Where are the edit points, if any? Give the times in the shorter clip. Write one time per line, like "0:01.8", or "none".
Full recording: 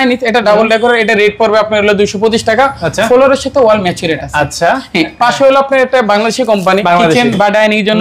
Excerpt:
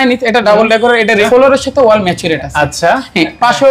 0:01.2